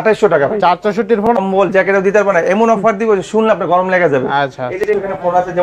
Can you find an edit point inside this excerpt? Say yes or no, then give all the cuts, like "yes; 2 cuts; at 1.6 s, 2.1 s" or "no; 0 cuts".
yes; 2 cuts; at 1.3 s, 4.8 s